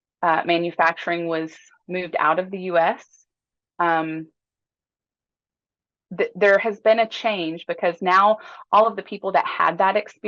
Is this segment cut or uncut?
uncut